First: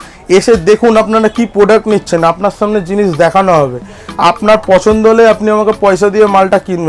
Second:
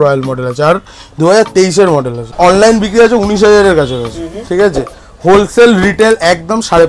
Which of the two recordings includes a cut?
second; 1 cut; at 2.3 s

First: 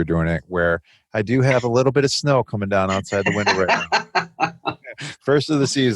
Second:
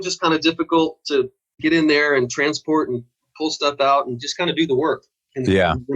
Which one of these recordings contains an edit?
second; 1 cut; at 1.4 s

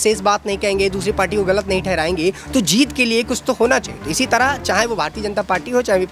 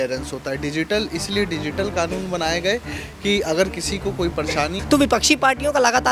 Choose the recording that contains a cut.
second; 1 cut; at 4.8 s

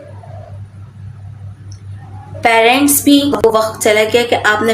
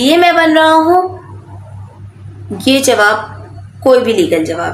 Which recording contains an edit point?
first; 1 cut; at 3.4 s

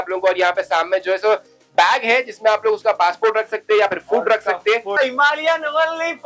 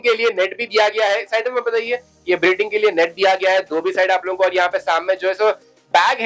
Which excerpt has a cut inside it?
first; 1 cut; at 5.0 s

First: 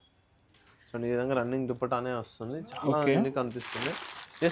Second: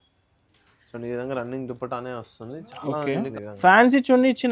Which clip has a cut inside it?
second; 1 cut; at 3.4 s

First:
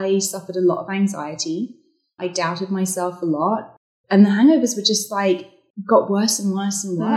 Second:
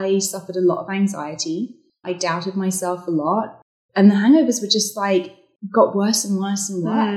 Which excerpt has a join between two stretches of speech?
second; 1 cut; at 1.9 s

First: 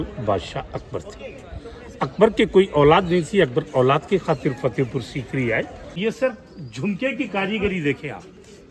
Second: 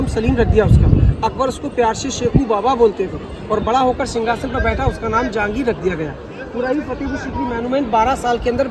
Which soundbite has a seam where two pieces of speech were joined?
first; 1 cut; at 6.0 s

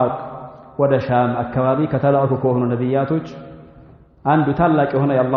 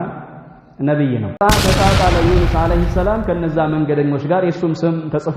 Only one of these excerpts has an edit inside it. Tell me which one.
second; 1 cut; at 1.4 s

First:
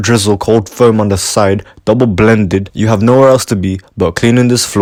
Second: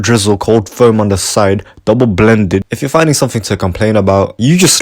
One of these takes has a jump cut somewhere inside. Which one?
second; 1 cut; at 2.7 s

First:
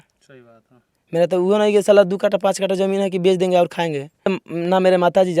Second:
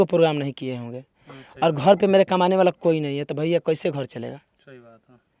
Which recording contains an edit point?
first; 1 cut; at 4.4 s

